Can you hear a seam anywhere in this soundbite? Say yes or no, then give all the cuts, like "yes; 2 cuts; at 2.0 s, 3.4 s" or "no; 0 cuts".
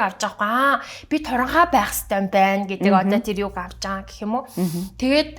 no; 0 cuts